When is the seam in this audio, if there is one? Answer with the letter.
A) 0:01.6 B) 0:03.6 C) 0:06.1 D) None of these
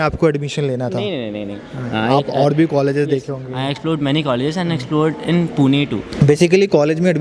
C